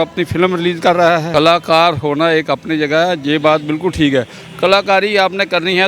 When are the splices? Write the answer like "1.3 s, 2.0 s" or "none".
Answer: 1.3 s